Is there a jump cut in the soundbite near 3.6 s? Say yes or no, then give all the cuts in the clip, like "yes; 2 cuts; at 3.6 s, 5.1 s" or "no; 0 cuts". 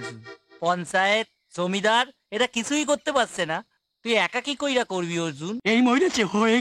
no; 1 cut; at 5.6 s